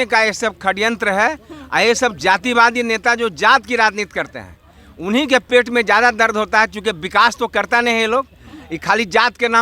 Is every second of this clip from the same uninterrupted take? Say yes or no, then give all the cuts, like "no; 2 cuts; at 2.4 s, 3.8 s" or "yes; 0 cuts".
yes; 0 cuts